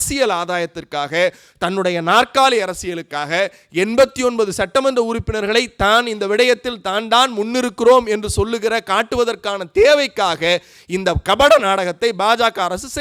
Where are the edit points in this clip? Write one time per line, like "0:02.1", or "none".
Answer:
none